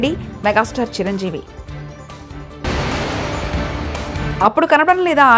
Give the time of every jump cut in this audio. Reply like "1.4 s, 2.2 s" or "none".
none